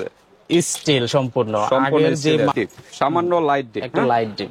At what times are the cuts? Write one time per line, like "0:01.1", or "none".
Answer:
0:02.5